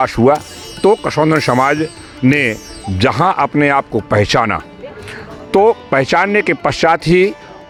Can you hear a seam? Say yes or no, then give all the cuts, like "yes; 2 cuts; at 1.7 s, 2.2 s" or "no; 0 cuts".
no; 0 cuts